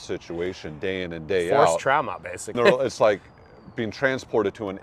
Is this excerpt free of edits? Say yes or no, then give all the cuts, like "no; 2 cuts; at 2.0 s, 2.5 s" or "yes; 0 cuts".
no; 1 cut; at 2.5 s